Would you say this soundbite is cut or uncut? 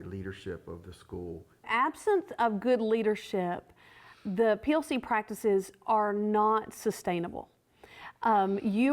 cut